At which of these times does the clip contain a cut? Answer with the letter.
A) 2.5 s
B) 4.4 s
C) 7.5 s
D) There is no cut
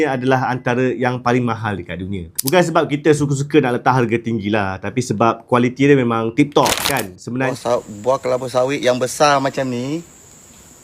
C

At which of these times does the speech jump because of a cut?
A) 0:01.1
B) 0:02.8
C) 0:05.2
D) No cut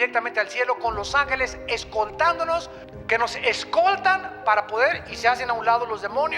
B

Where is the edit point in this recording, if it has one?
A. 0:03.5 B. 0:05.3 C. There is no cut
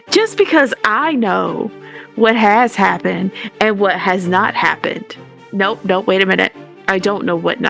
C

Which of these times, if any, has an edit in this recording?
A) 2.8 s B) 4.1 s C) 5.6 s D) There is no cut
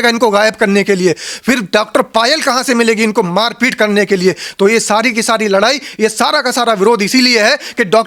D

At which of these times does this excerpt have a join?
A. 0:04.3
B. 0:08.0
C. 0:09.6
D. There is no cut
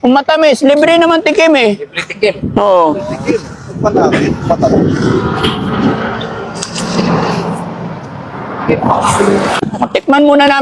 C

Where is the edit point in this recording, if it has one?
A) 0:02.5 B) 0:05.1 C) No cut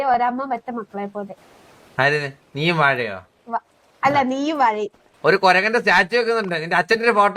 B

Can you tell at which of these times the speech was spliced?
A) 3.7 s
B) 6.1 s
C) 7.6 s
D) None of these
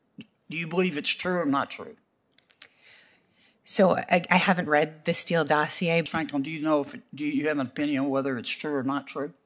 B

